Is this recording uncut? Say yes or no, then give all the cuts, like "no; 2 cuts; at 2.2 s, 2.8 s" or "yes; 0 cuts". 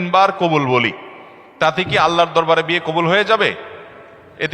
yes; 0 cuts